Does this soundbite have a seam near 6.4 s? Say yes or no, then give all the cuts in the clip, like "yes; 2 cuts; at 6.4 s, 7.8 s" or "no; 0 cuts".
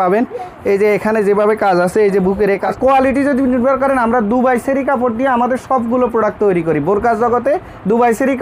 no; 1 cut; at 2.7 s